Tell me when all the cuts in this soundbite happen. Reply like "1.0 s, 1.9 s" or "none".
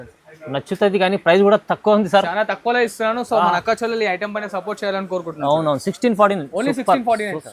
none

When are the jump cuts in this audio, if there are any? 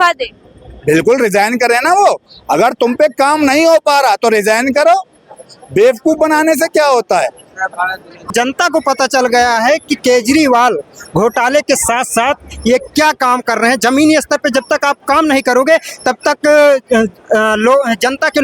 8.3 s

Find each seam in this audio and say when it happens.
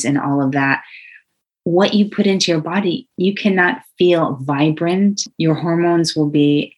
3.1 s, 5.3 s

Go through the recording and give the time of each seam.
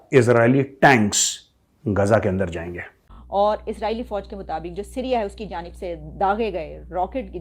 2.7 s

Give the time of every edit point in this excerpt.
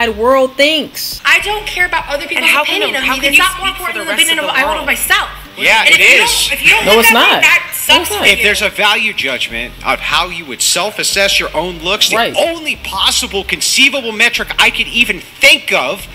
1.1 s

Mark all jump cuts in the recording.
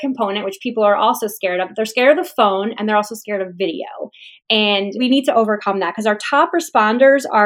5.0 s

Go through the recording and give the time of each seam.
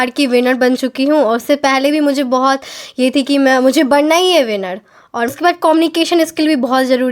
5.3 s

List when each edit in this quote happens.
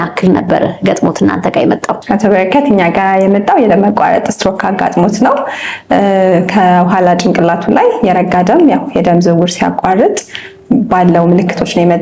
none

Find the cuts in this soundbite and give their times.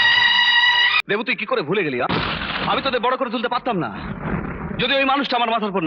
1.0 s

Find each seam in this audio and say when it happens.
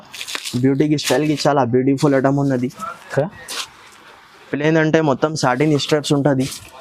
none

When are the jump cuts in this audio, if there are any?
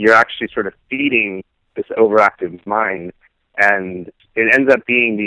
4.2 s

